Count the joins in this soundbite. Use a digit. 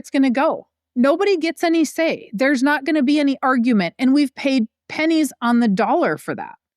1